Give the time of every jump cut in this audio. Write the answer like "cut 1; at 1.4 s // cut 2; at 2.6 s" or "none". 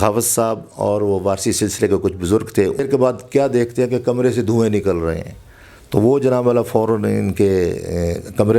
cut 1; at 2.8 s